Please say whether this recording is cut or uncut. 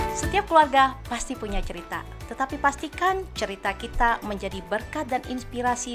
uncut